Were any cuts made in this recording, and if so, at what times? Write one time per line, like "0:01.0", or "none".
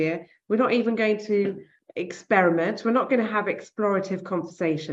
none